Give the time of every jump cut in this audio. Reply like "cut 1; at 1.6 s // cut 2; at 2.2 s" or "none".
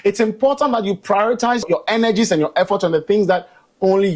cut 1; at 1.7 s